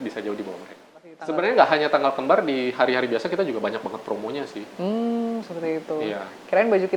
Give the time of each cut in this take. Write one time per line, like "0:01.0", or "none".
0:01.2